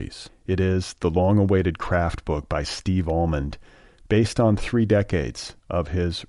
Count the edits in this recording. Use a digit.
0